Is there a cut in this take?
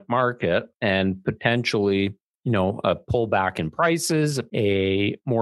yes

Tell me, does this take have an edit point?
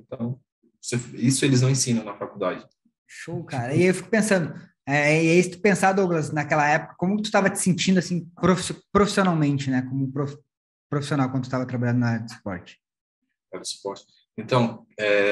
no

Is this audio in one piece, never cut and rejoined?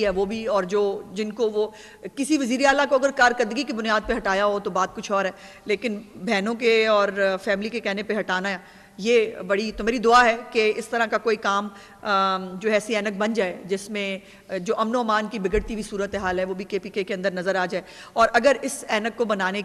yes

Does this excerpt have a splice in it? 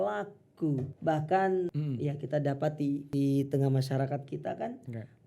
yes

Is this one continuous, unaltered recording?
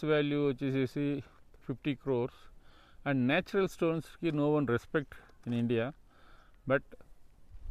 yes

